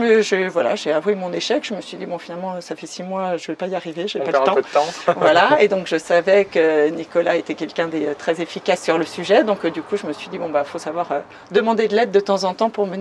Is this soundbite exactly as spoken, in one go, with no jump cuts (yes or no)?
yes